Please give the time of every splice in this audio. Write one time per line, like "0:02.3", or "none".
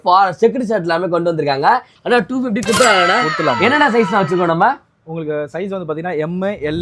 0:01.9